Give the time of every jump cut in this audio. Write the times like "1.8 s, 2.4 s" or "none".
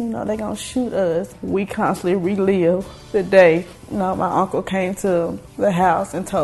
1.3 s, 2.9 s, 3.8 s, 5.4 s